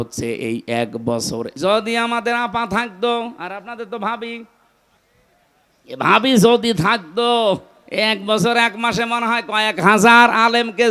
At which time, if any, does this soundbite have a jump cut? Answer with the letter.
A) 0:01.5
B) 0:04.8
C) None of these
A